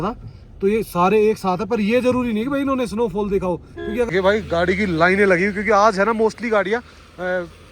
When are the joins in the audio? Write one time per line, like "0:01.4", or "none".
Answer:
0:04.1